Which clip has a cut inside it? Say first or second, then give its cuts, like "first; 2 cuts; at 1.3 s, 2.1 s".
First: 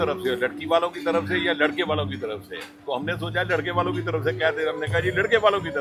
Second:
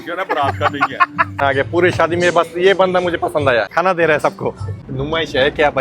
second; 3 cuts; at 1.3 s, 3.7 s, 4.8 s